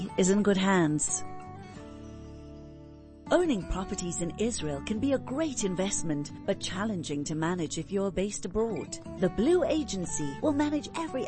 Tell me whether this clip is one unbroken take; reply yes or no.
no